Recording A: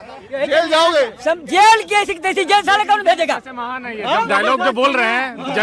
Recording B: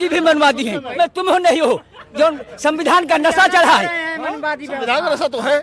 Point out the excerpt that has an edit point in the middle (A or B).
B